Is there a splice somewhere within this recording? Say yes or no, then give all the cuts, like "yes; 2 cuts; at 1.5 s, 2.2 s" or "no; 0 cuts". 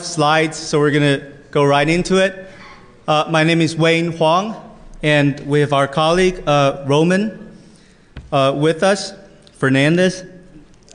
no; 0 cuts